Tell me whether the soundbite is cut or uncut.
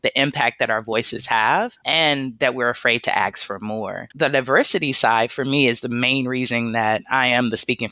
cut